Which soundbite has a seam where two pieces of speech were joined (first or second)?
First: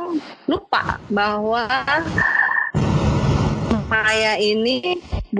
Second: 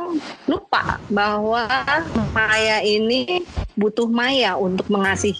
second